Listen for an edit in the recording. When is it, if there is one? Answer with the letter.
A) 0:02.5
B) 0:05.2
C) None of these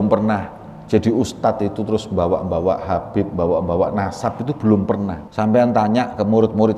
B